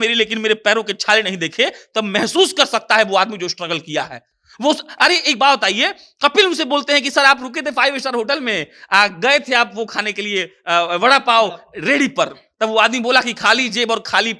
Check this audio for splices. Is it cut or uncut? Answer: uncut